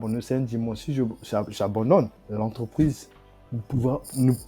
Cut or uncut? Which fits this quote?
cut